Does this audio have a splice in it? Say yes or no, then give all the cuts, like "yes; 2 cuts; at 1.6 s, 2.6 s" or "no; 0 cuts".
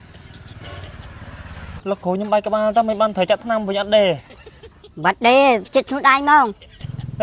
yes; 1 cut; at 1.8 s